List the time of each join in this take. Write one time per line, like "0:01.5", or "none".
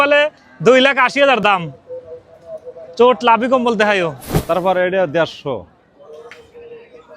0:04.3